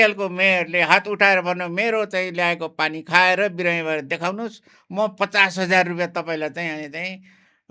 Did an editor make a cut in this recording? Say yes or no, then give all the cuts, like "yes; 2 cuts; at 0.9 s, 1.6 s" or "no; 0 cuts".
no; 0 cuts